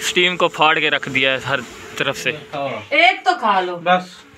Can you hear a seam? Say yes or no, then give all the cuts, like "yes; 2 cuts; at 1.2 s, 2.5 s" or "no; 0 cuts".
yes; 1 cut; at 2.5 s